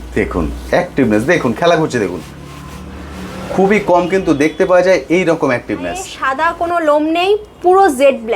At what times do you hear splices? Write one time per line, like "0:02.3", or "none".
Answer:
0:06.1